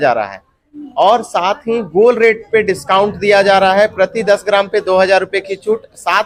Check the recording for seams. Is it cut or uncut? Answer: uncut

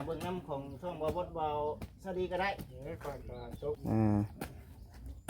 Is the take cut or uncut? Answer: cut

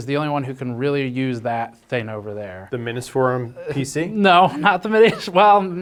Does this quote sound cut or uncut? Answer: uncut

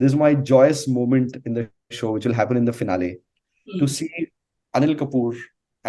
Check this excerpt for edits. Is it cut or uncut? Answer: uncut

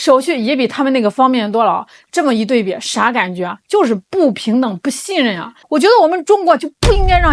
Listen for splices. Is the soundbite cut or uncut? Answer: cut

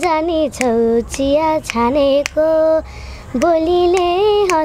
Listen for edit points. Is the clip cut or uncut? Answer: uncut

